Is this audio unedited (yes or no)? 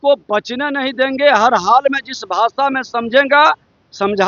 yes